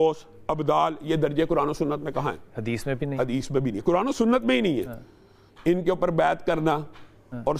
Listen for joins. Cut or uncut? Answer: uncut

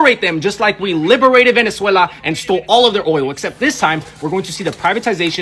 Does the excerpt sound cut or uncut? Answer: uncut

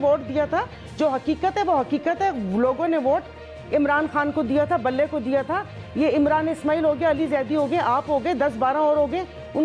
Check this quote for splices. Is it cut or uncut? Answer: uncut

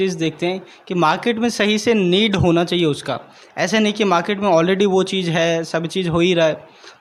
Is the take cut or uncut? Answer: uncut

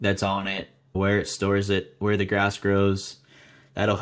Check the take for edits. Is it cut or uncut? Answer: cut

